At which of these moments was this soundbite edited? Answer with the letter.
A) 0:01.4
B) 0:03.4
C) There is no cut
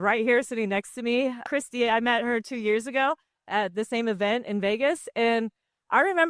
A